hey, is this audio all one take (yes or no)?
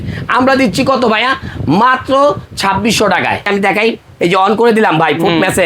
no